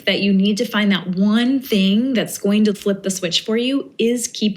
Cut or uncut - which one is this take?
cut